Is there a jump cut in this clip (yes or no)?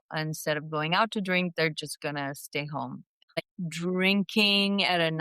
yes